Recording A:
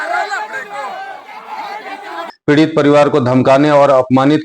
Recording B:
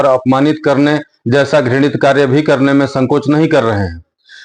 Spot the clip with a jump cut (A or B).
A